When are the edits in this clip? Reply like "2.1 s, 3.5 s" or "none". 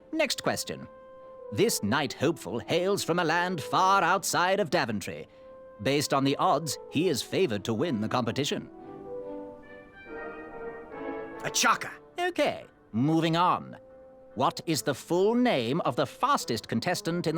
none